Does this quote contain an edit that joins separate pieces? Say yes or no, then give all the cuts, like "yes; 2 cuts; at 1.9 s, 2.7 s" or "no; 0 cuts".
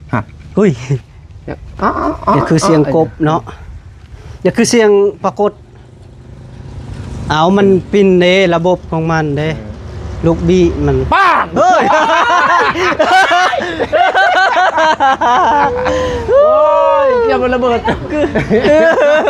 no; 0 cuts